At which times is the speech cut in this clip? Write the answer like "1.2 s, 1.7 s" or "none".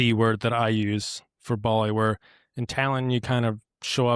none